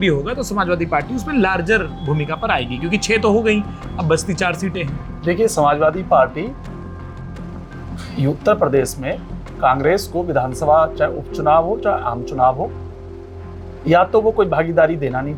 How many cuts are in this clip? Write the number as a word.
zero